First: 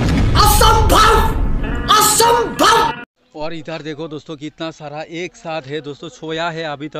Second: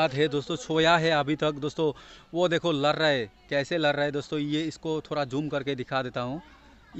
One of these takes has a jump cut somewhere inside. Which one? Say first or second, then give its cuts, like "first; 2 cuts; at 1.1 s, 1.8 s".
first; 1 cut; at 3.2 s